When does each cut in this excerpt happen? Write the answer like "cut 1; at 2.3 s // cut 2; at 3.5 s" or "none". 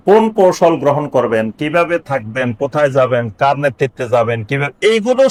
none